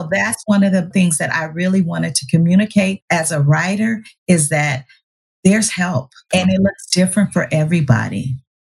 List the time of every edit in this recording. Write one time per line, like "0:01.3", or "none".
0:00.9
0:03.0
0:06.2